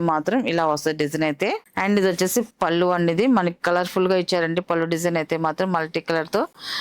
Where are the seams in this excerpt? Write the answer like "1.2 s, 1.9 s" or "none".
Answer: none